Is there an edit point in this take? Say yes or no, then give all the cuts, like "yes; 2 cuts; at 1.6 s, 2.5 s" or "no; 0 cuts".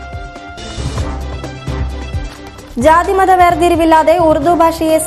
yes; 1 cut; at 2.2 s